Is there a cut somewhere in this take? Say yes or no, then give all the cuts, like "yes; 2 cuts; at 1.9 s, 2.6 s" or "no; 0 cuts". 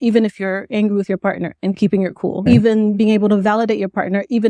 yes; 1 cut; at 2.4 s